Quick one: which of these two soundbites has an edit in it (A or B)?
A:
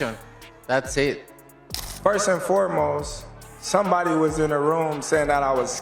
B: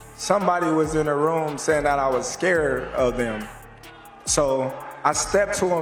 A